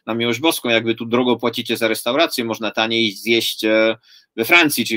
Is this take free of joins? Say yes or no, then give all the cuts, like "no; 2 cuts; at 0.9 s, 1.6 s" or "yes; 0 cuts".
yes; 0 cuts